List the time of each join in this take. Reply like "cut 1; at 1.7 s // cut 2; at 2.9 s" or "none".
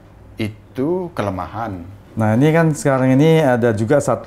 cut 1; at 2.0 s